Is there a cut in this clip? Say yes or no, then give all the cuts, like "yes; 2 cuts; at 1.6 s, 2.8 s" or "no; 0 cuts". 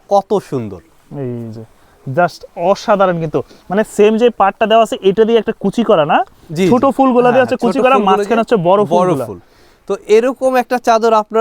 no; 0 cuts